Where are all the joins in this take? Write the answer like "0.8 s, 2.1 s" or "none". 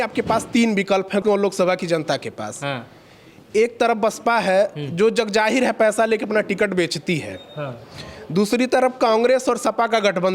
1.2 s